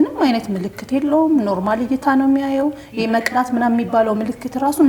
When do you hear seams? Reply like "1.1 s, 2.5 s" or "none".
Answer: none